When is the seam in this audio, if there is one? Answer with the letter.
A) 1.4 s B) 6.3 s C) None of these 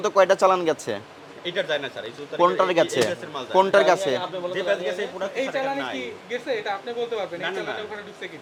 C